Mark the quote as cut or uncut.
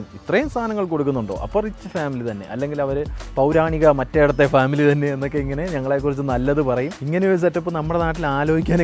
cut